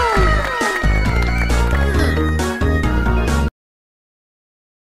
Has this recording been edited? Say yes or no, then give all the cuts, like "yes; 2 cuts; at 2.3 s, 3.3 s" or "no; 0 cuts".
no; 0 cuts